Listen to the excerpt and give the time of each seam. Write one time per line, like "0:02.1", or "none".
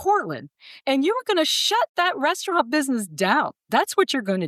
0:03.6